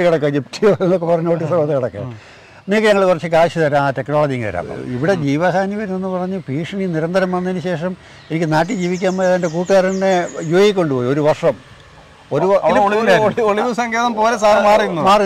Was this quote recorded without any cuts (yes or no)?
no